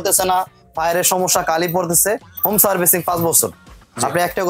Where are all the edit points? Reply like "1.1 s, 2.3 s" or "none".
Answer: none

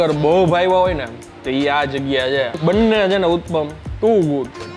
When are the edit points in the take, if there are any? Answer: 2.6 s

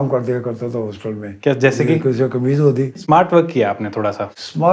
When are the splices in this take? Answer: 3.0 s

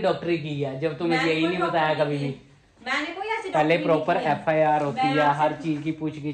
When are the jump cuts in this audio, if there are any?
none

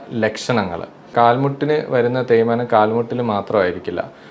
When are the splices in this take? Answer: 1.1 s

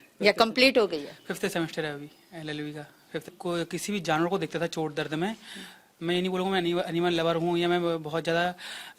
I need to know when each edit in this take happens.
3.3 s

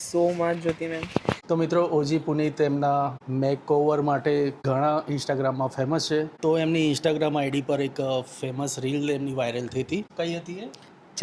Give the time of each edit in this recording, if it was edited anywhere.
1.4 s, 3.2 s, 4.6 s, 6.3 s, 10.1 s

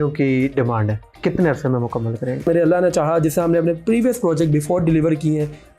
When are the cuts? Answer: 1.0 s, 2.5 s

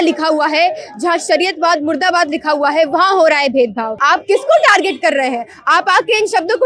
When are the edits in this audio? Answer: 3.9 s

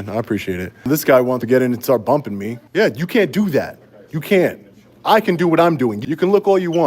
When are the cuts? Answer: 0.9 s, 2.5 s, 6.0 s

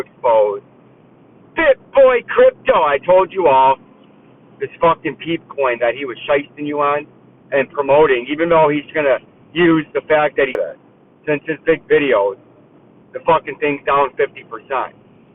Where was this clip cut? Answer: 10.6 s

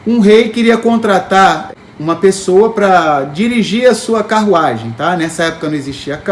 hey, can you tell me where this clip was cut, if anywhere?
1.7 s

